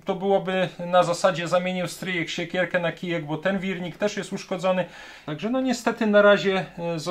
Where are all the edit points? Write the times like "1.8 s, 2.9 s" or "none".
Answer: 5.2 s